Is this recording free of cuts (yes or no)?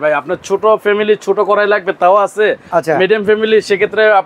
yes